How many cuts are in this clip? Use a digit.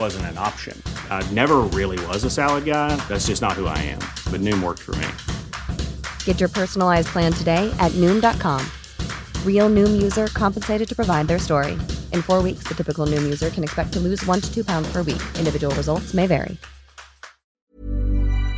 1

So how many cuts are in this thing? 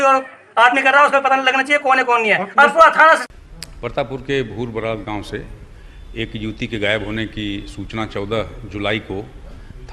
1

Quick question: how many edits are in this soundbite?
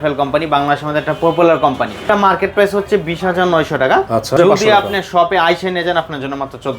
2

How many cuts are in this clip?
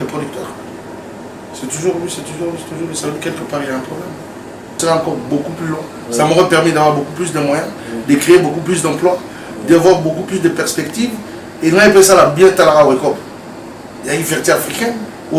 1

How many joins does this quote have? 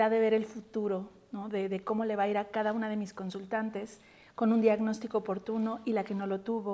0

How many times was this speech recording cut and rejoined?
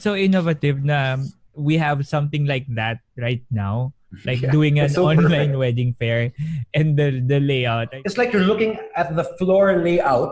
1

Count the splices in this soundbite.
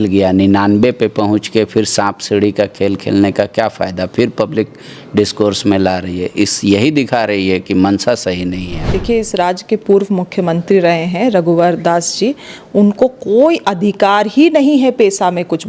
1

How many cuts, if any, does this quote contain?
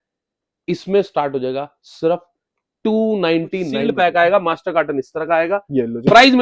1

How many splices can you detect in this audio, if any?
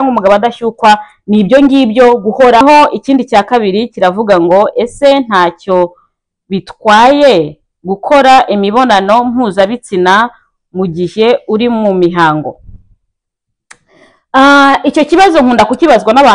1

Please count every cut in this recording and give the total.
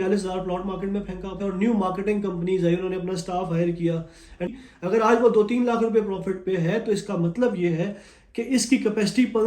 2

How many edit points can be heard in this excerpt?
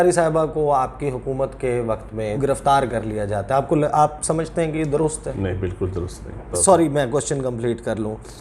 2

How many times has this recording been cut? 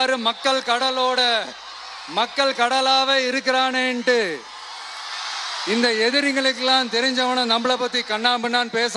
0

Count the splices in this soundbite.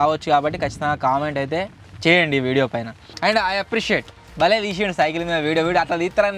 1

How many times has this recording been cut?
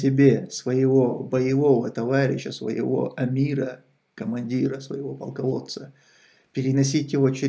0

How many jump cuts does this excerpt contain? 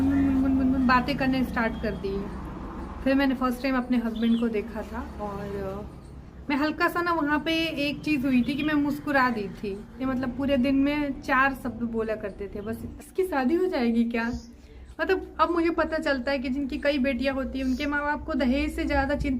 2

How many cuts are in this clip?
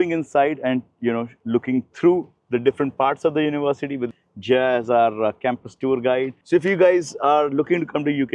1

